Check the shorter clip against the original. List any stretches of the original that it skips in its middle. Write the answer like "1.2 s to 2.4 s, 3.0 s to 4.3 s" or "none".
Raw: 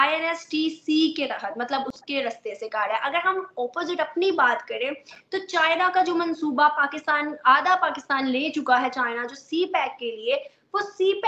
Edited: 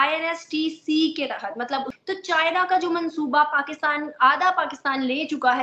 1.9 s to 5.2 s